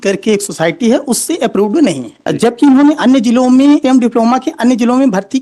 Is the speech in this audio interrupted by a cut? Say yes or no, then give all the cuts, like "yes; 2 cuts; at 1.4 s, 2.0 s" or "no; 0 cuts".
yes; 2 cuts; at 2.1 s, 3.8 s